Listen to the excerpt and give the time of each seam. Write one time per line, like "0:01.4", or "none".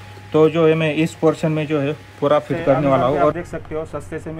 0:03.3